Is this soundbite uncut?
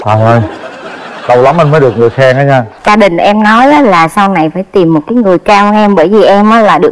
no; 1 cut; at 2.9 s

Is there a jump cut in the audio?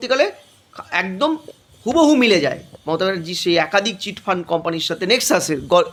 no; 0 cuts

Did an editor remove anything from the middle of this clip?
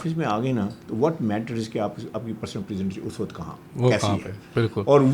no; 0 cuts

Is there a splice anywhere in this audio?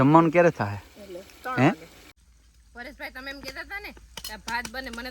yes; 1 cut; at 2.2 s

